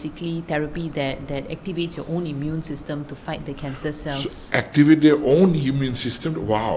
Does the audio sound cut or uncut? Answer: uncut